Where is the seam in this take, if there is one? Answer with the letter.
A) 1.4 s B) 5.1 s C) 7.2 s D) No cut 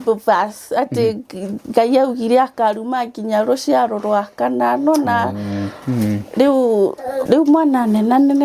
C